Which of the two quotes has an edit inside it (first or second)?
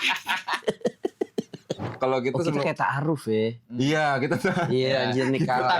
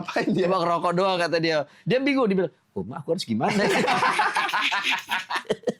first